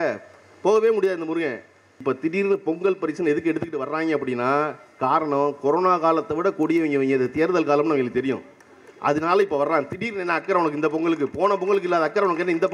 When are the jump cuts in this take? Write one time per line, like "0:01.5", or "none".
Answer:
0:01.9

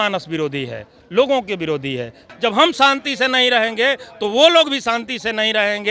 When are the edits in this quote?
0:02.2

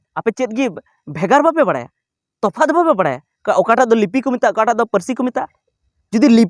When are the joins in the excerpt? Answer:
none

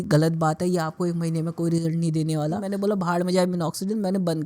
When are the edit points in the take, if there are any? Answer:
0:02.6

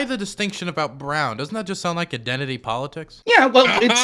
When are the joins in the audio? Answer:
0:03.1

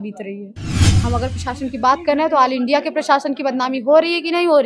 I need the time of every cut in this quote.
0:00.9

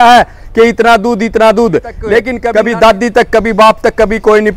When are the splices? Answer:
0:02.4

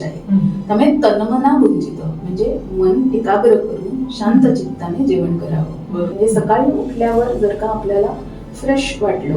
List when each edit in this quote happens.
0:06.1

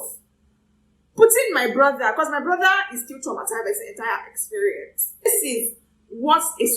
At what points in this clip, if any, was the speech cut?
0:05.3

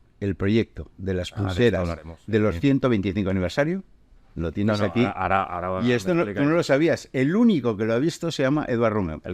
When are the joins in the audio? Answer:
none

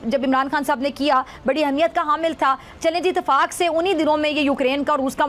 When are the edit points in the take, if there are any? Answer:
none

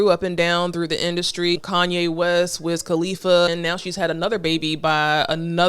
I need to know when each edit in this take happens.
0:01.6
0:03.5

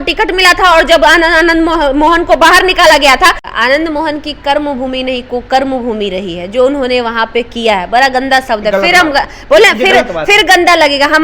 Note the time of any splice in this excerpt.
0:03.4

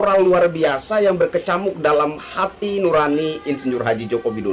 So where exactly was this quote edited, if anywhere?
none

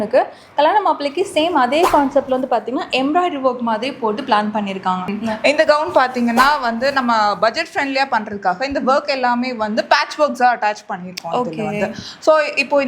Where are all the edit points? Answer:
0:05.2

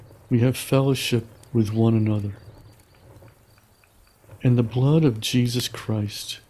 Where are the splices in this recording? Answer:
0:02.4
0:04.4

